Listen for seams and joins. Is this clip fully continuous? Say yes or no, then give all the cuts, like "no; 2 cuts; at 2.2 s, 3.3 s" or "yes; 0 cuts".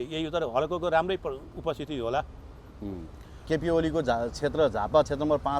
no; 1 cut; at 3.5 s